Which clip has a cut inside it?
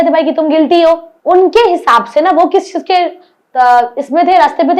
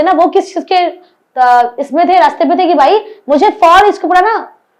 first; 1 cut; at 1.1 s

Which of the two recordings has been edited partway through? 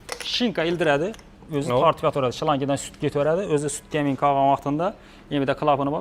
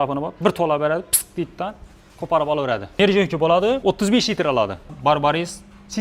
second; 3 cuts; at 2.9 s, 3.8 s, 4.9 s

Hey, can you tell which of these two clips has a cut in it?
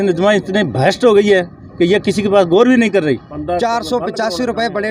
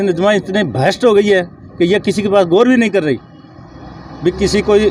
first; 1 cut; at 3.3 s

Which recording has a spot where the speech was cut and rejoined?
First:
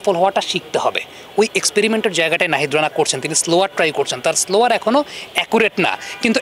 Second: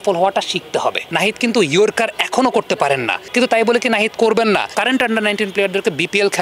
second; 3 cuts; at 1.1 s, 3.2 s, 4.7 s

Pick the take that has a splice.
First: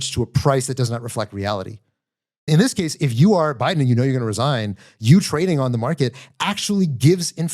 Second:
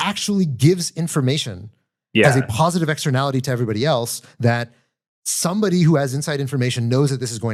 first; 1 cut; at 2.5 s

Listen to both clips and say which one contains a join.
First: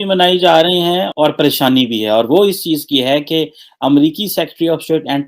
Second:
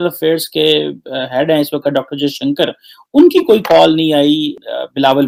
first; 1 cut; at 1.0 s

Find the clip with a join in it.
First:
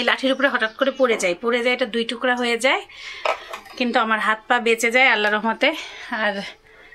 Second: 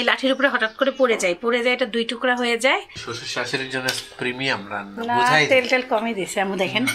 second; 1 cut; at 3.0 s

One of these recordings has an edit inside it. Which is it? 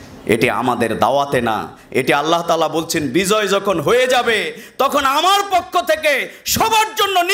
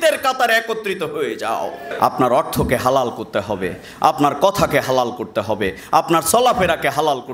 second; 1 cut; at 1.9 s

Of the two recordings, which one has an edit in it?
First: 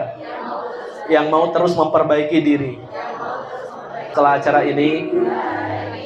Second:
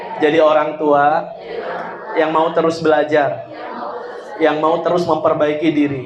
first; 1 cut; at 4.1 s

